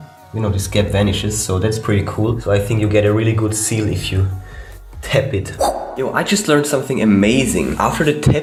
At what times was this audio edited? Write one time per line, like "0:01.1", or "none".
none